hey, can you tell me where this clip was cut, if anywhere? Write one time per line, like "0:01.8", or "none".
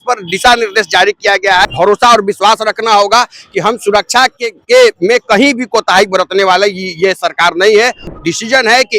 0:01.6
0:08.0